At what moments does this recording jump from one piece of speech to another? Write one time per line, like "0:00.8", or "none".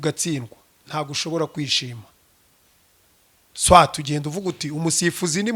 none